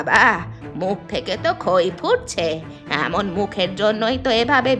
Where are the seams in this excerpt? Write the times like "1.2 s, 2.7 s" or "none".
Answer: none